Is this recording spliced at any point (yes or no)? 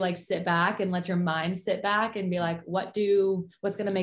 no